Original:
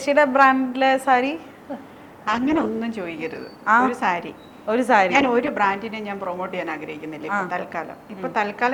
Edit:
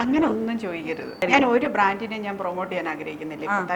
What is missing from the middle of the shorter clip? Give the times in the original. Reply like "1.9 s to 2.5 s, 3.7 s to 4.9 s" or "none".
3.6 s to 5.1 s